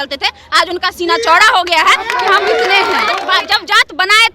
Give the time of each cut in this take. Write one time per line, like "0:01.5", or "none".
0:03.2